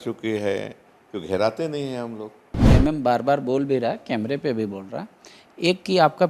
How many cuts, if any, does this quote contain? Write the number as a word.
one